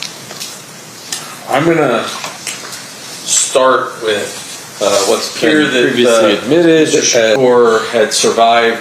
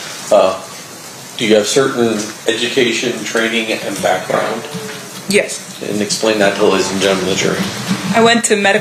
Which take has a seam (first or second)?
first